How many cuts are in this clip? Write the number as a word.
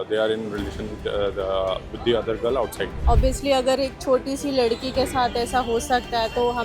one